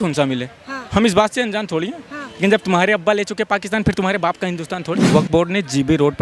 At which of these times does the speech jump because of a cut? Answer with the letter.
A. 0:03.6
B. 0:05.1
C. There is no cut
B